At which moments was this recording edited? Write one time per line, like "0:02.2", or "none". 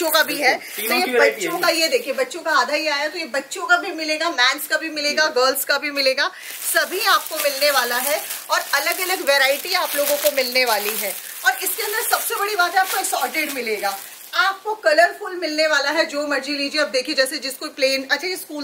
none